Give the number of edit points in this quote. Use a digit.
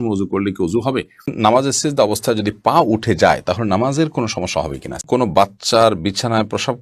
2